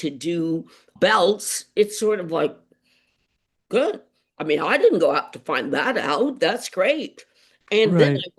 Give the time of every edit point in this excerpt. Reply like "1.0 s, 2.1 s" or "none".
none